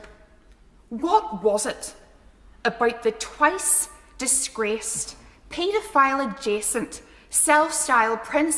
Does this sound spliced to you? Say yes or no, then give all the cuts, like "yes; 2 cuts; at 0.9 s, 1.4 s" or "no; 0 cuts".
no; 0 cuts